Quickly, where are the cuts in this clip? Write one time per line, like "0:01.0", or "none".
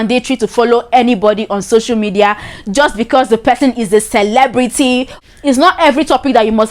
0:05.1